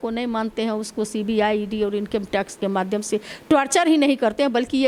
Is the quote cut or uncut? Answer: uncut